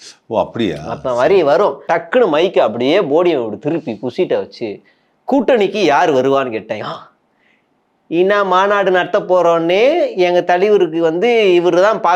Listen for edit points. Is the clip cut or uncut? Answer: cut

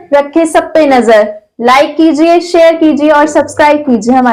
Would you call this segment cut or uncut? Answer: uncut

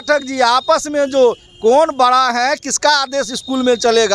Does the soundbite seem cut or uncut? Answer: uncut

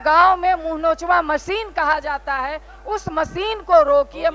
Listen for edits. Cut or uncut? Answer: uncut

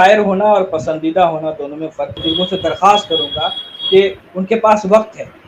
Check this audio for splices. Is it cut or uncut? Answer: cut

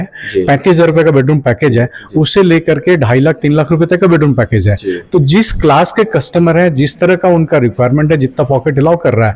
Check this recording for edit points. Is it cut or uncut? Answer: uncut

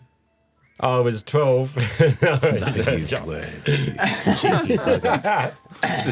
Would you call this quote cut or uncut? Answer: uncut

